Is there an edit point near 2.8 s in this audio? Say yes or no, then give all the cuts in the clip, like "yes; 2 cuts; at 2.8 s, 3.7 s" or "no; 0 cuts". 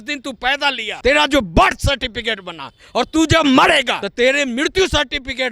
no; 2 cuts; at 0.9 s, 4.0 s